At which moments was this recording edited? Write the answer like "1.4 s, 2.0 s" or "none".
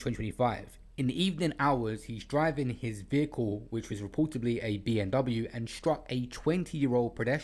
none